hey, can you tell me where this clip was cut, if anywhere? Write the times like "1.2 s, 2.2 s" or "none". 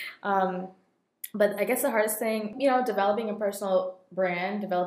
2.5 s